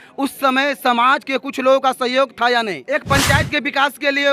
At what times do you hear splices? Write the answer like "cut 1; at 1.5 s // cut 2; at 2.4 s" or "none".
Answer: cut 1; at 2.8 s